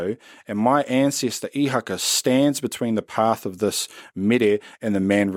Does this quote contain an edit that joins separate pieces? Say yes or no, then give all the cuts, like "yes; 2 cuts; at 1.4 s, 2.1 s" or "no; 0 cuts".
no; 0 cuts